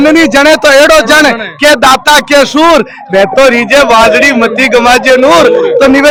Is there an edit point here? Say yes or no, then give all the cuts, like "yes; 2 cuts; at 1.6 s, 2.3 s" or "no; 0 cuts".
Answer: no; 0 cuts